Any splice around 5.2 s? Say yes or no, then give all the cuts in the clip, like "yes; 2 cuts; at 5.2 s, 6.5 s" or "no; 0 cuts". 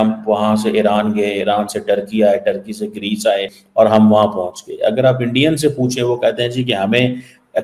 no; 1 cut; at 3.6 s